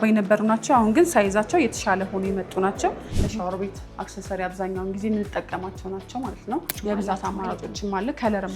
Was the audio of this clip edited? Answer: yes; 2 cuts; at 3.1 s, 6.7 s

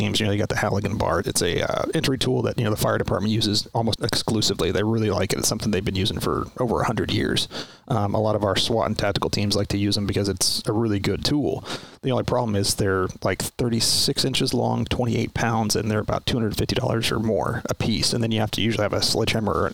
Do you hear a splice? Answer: yes; 2 cuts; at 1.3 s, 3.9 s

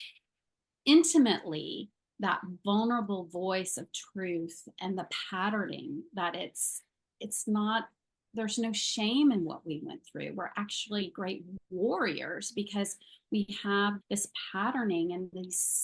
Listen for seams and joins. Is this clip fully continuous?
yes; 0 cuts

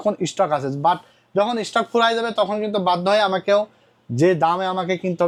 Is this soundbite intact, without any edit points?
yes; 0 cuts

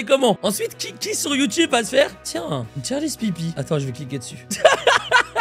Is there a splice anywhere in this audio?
no; 0 cuts

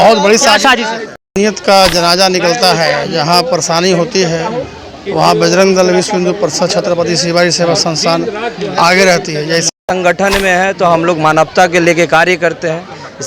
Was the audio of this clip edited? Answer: yes; 2 cuts; at 1.1 s, 9.7 s

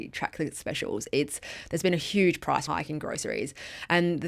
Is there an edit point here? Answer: yes; 1 cut; at 2.6 s

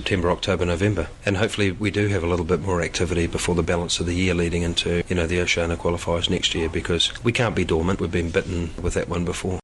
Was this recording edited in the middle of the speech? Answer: yes; 5 cuts; at 1.1 s, 5.0 s, 7.1 s, 8.0 s, 8.8 s

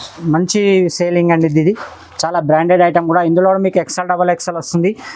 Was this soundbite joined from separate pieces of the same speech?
no; 0 cuts

